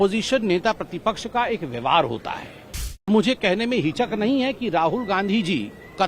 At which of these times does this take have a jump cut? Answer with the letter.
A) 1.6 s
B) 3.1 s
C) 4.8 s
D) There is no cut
B